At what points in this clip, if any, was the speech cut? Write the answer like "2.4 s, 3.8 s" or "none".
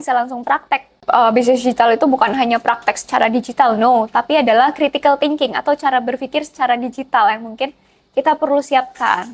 1.0 s